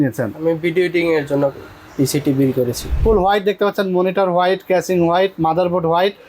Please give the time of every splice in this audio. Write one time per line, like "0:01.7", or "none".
0:02.9